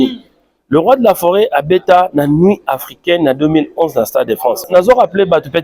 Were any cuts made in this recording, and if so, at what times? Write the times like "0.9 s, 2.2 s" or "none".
4.7 s

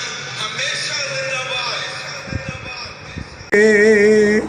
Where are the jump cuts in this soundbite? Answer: 3.5 s

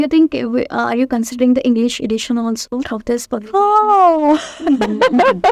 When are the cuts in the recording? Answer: none

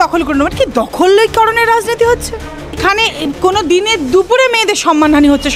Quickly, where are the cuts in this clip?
2.8 s

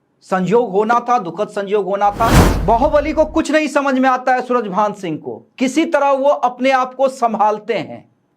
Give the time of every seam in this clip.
2.5 s

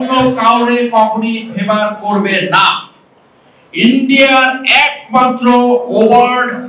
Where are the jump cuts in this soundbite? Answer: none

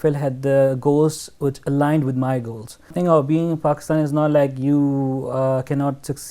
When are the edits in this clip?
2.9 s

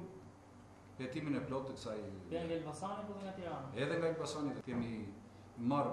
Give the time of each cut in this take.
4.6 s

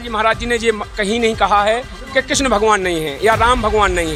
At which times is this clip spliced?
none

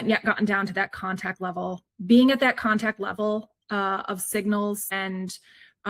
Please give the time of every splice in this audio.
4.9 s

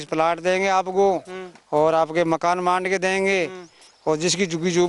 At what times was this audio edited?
none

